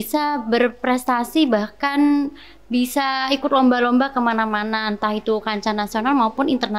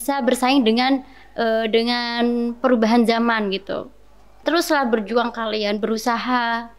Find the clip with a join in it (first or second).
second